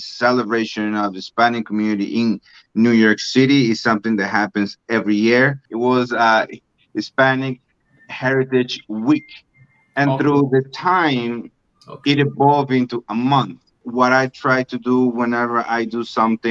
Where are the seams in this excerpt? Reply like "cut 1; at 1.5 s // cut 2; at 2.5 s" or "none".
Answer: cut 1; at 5.6 s // cut 2; at 13.8 s